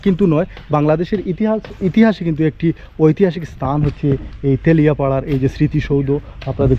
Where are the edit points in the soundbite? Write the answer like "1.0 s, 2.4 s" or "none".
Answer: none